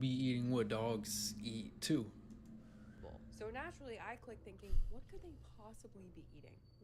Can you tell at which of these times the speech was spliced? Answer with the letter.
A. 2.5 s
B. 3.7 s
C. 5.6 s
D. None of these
B